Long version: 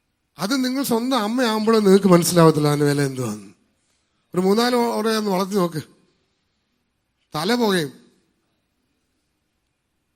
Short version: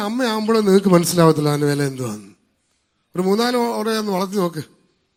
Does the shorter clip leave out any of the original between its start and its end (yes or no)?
no